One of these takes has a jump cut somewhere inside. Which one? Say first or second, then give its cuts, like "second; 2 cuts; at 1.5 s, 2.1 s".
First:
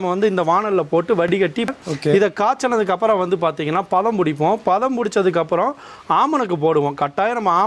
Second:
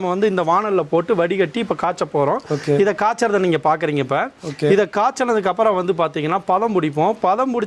first; 1 cut; at 1.5 s